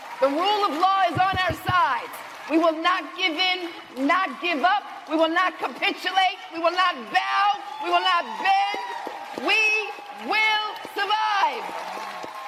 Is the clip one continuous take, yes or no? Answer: yes